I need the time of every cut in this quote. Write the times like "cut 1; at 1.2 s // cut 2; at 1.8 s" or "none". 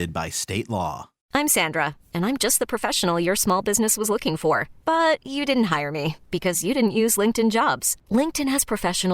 cut 1; at 1.3 s